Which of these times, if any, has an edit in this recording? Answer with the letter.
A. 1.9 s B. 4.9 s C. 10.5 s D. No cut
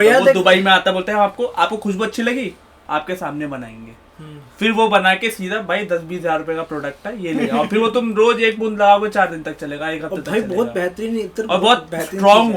D